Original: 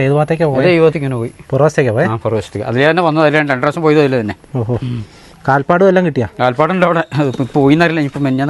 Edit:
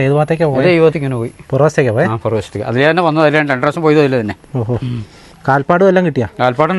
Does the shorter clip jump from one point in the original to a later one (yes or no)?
no